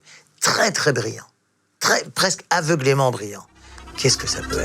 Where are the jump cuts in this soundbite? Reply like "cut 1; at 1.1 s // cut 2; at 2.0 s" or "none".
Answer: none